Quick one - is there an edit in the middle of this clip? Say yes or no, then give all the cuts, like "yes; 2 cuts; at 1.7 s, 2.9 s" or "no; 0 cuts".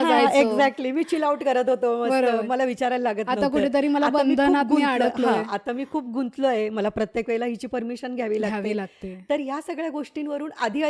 no; 0 cuts